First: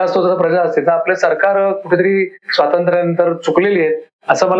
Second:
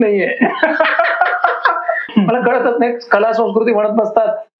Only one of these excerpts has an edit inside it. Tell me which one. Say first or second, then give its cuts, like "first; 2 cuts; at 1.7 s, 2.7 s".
second; 1 cut; at 2.1 s